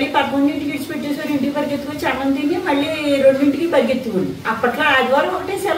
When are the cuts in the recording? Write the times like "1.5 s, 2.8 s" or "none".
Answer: 4.4 s